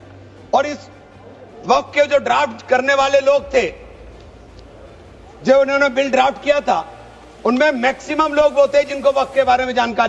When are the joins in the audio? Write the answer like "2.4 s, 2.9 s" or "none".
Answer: none